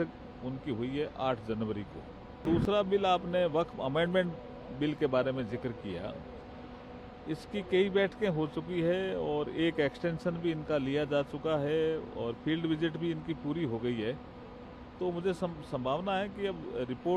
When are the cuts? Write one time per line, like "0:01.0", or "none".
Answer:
0:02.4